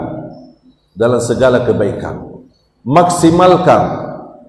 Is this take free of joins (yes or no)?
yes